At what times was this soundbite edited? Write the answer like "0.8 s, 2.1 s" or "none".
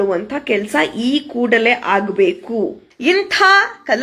2.9 s

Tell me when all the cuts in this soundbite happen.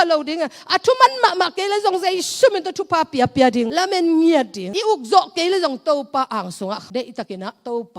3.7 s

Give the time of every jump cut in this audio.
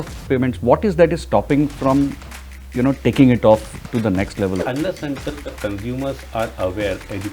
4.6 s

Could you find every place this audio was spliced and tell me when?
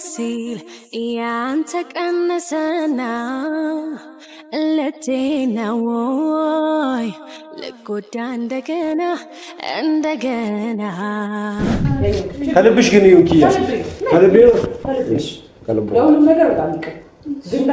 11.9 s

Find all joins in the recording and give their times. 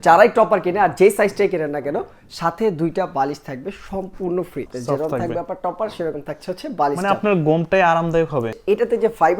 4.7 s, 8.5 s

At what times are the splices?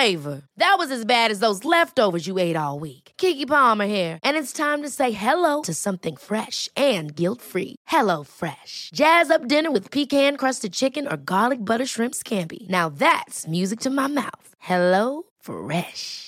none

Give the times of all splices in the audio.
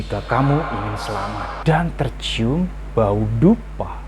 1.5 s

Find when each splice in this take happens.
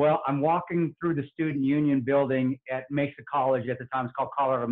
none

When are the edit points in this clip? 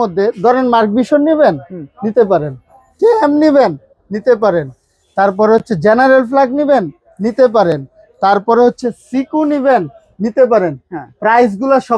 none

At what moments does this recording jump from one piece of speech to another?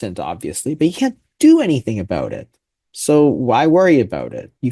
none

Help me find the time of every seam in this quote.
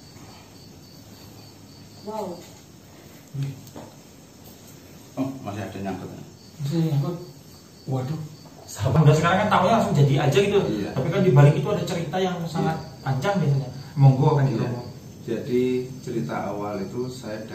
8.9 s

